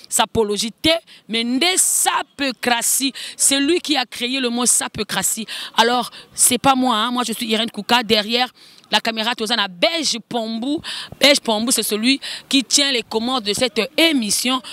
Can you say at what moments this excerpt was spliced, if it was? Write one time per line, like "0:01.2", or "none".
none